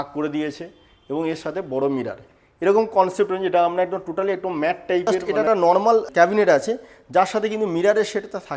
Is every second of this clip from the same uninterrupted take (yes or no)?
no